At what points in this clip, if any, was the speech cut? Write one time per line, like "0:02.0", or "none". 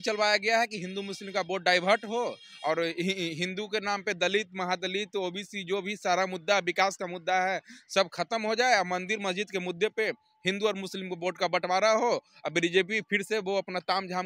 none